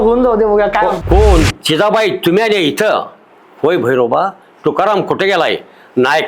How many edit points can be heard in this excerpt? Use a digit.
1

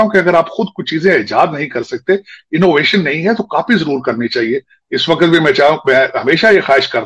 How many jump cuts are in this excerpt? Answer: 0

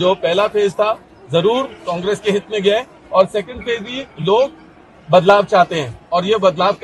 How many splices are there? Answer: 0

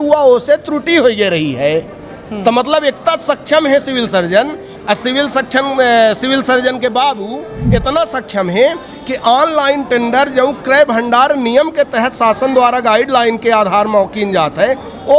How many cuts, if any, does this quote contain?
0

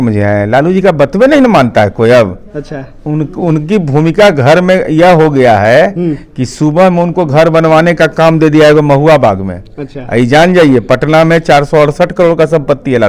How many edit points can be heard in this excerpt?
0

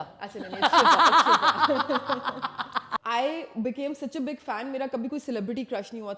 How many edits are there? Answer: 1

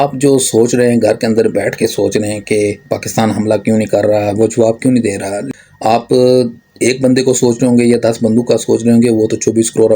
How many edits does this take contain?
1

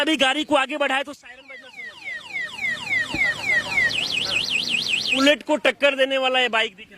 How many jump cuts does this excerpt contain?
1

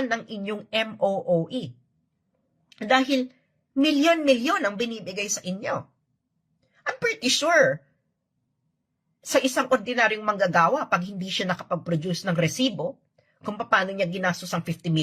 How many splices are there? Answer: 1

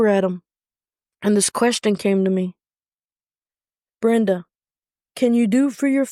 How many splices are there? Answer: 0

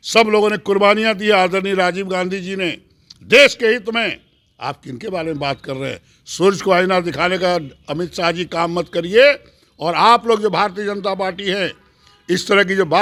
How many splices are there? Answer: 0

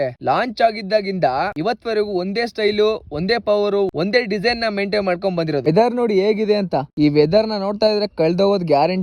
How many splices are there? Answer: 1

